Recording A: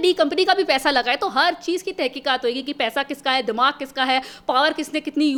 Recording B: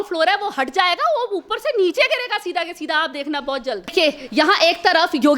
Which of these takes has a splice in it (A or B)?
B